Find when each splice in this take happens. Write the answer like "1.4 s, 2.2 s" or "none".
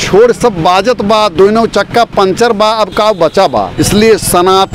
3.7 s